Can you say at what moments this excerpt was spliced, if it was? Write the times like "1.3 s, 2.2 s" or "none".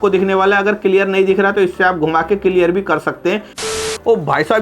3.6 s